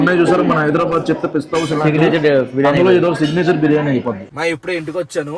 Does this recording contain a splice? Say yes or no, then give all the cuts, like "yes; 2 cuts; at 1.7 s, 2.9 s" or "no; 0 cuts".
yes; 1 cut; at 4.2 s